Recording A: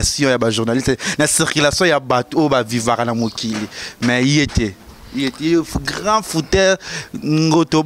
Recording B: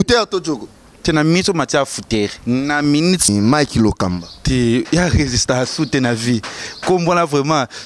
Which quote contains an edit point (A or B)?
B